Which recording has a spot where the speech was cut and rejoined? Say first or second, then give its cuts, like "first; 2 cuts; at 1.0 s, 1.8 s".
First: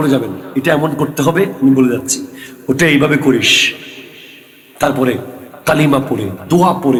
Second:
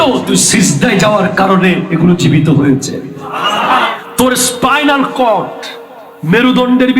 second; 1 cut; at 3.9 s